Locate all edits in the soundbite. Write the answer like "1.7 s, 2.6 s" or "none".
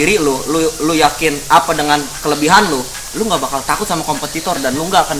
none